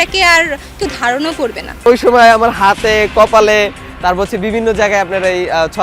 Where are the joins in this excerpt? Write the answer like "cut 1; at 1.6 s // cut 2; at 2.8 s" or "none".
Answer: cut 1; at 1.9 s